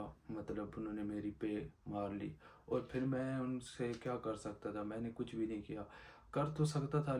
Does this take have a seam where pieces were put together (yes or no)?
no